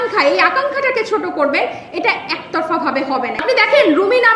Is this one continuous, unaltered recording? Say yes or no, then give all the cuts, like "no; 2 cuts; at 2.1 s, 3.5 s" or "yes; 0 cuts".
no; 1 cut; at 3.3 s